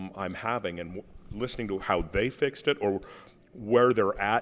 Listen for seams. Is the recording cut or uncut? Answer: uncut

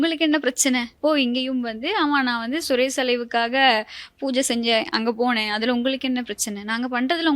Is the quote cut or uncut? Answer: cut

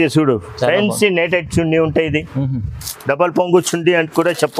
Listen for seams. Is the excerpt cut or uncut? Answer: uncut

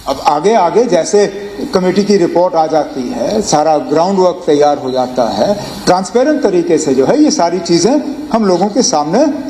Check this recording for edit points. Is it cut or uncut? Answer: uncut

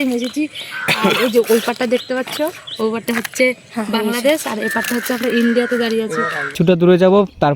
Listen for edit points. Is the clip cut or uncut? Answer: cut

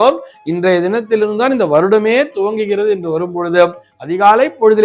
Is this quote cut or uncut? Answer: uncut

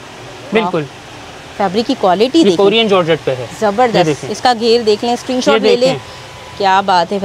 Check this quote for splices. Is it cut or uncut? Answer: uncut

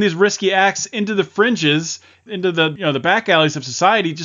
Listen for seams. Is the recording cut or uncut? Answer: cut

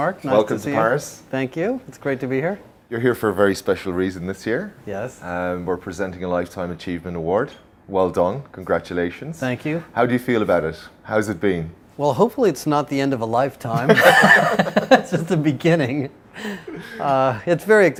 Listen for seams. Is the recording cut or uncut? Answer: uncut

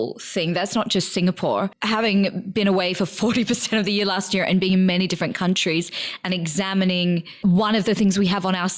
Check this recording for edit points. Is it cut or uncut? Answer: uncut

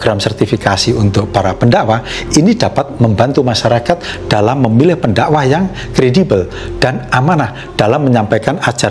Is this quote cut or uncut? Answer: uncut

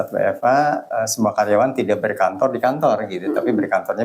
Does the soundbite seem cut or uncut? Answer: uncut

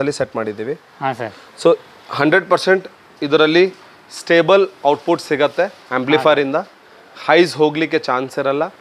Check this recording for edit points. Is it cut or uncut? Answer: uncut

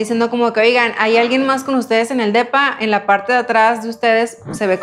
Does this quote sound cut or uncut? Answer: uncut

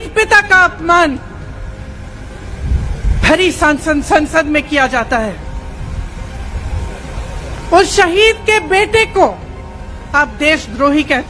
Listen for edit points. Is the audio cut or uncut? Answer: uncut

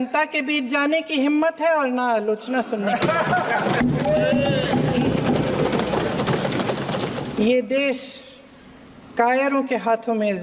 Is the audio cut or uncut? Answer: uncut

